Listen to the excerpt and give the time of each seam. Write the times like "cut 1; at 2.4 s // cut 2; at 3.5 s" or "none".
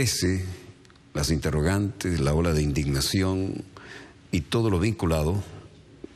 cut 1; at 1.1 s